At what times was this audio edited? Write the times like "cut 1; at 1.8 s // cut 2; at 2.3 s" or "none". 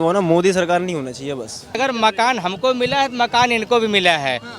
cut 1; at 1.8 s